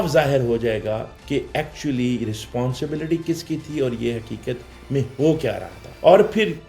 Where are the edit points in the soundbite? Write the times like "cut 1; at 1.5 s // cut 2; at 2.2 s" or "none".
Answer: none